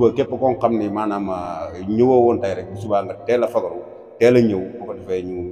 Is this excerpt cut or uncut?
uncut